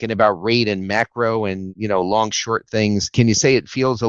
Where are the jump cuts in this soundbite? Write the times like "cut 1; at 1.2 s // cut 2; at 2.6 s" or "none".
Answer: cut 1; at 1.7 s // cut 2; at 3.1 s